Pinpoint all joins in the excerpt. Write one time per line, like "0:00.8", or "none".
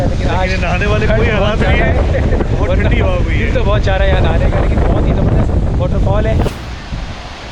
0:06.5